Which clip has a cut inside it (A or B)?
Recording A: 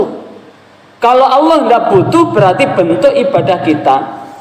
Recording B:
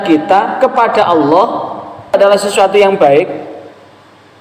B